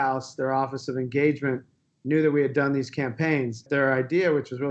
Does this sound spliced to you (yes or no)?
yes